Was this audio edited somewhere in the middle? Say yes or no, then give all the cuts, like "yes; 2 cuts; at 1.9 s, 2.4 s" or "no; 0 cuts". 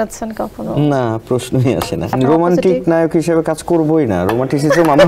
yes; 1 cut; at 2.1 s